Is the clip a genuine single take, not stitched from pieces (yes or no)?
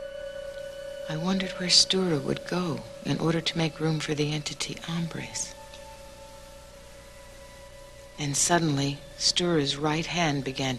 no